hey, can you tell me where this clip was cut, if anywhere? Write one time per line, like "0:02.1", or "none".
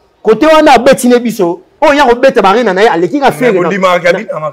0:01.6